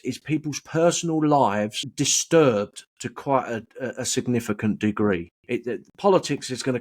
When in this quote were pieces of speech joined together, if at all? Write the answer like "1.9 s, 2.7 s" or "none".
1.8 s